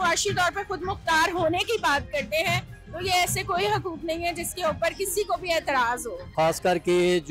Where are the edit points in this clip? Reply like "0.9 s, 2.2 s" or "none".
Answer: 6.2 s